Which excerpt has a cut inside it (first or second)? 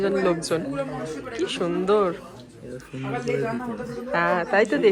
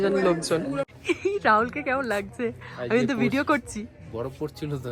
second